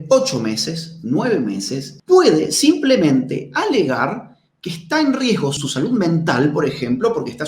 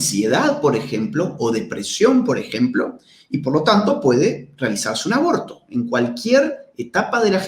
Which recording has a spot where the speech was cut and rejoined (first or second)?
first